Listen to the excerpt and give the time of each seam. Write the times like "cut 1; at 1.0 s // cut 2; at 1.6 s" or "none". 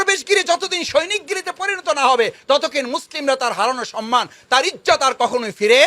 none